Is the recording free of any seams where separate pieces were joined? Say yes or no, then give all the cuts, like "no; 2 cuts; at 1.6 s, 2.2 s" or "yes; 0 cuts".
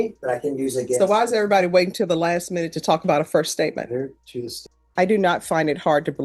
no; 1 cut; at 4.5 s